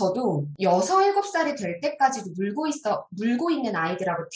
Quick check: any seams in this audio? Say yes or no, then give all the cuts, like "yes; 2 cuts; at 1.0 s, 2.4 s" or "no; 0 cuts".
no; 0 cuts